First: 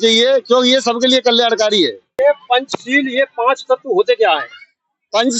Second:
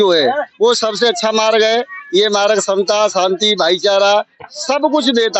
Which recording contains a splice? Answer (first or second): first